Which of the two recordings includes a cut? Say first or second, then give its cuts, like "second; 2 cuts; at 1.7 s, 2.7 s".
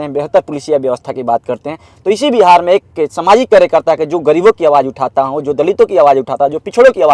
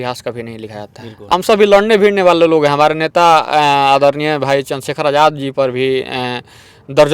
second; 1 cut; at 1.3 s